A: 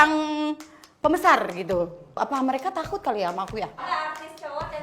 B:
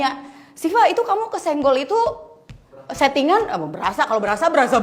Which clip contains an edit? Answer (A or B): A